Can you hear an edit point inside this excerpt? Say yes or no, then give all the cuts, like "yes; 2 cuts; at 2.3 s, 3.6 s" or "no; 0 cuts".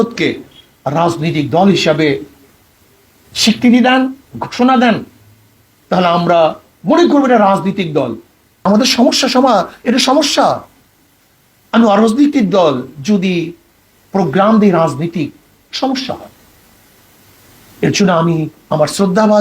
yes; 1 cut; at 8.6 s